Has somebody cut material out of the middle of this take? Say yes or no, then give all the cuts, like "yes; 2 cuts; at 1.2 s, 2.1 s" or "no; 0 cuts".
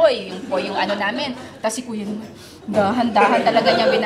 no; 0 cuts